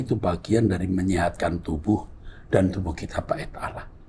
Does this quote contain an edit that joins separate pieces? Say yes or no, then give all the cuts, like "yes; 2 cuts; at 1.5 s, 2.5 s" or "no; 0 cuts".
no; 0 cuts